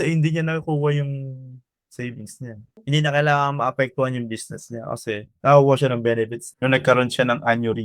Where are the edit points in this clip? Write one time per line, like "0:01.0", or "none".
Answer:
0:02.7
0:05.3
0:06.4